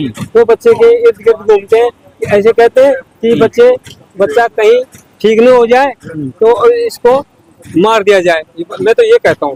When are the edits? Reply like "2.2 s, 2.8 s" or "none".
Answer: none